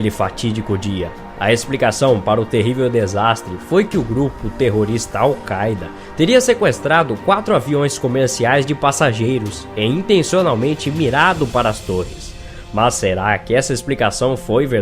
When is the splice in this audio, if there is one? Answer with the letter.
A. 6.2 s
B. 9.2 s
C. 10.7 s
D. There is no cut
C